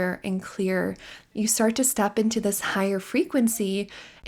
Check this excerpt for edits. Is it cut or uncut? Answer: cut